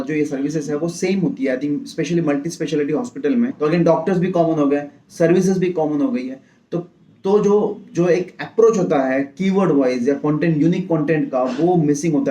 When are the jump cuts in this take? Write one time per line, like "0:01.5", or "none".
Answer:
0:03.5